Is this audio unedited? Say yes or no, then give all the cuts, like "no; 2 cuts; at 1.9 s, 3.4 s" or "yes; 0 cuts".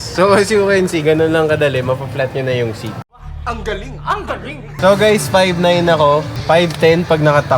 no; 1 cut; at 4.7 s